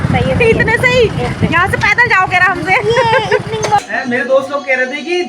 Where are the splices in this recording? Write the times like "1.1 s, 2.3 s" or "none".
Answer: 3.8 s